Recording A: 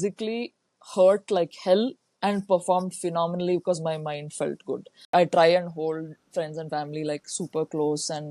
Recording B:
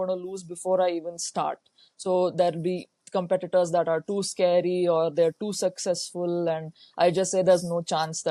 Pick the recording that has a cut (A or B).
A